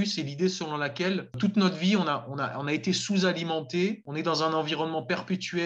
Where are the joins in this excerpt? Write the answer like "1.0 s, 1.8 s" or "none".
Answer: 1.4 s, 4.0 s